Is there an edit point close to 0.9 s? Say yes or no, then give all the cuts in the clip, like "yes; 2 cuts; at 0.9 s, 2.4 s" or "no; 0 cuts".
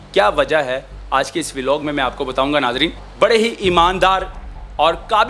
no; 1 cut; at 3.0 s